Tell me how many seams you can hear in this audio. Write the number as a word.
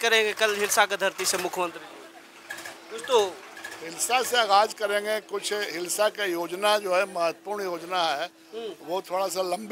zero